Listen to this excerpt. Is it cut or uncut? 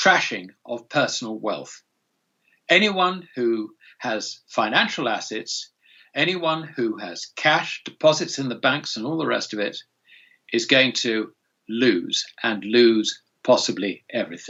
uncut